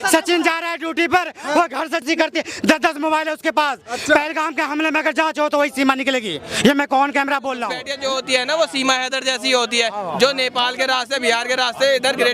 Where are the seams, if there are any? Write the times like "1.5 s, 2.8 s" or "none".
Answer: 2.0 s, 7.8 s